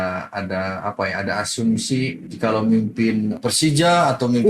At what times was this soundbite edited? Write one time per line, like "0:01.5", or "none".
0:02.2
0:03.4